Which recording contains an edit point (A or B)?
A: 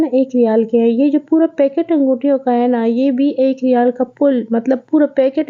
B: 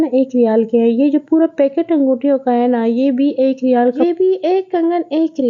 B